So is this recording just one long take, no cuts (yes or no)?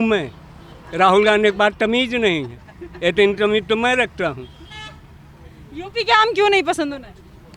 yes